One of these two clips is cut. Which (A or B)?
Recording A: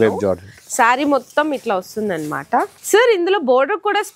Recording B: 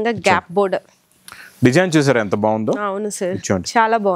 A